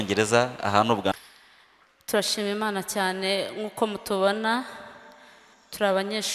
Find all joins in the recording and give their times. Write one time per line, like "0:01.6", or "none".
0:01.1